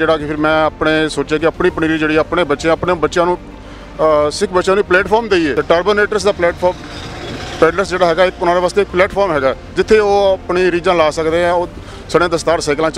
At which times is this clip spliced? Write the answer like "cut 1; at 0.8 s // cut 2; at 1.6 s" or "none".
cut 1; at 5.6 s